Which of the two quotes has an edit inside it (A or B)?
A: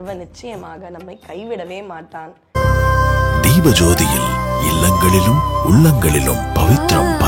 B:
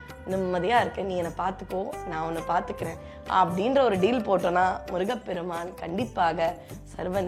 A